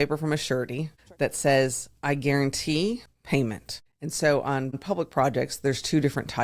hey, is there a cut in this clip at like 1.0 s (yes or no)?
yes